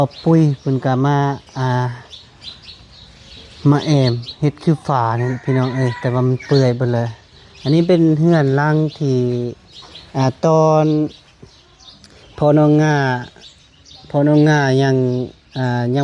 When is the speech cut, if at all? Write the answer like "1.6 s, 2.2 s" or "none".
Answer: none

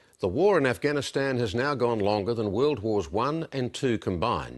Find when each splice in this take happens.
none

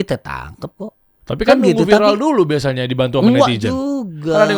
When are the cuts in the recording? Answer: 1.1 s

